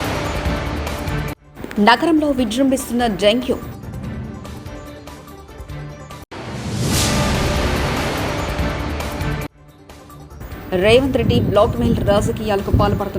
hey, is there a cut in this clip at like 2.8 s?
no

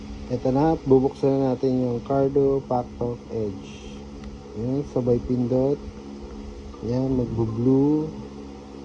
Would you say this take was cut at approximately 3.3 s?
no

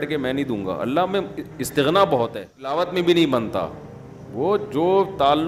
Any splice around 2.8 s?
yes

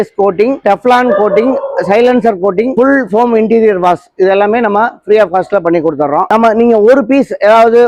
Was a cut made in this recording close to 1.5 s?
no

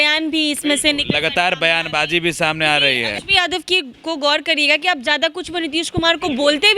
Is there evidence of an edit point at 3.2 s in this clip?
yes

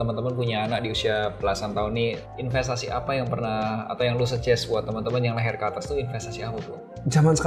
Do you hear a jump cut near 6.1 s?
no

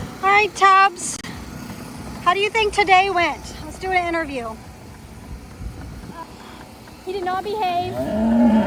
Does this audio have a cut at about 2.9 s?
no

